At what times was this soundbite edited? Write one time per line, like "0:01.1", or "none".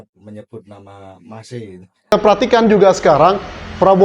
0:02.1